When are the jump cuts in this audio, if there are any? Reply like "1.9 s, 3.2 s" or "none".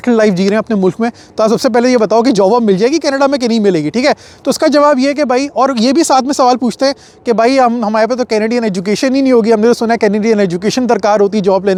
none